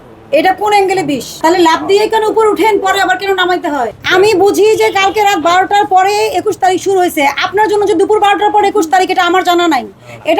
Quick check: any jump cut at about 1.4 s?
yes; 2 cuts; at 1.4 s, 4.0 s

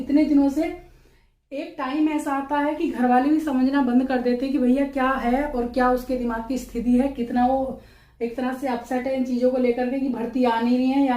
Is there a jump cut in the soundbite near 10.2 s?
no; 0 cuts

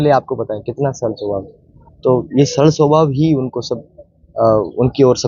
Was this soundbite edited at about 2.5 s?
no; 0 cuts

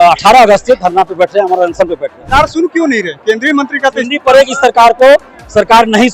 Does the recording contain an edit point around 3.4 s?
no; 1 cut; at 2.2 s

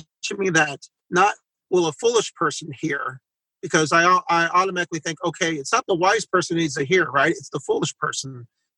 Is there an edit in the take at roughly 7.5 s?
no; 0 cuts

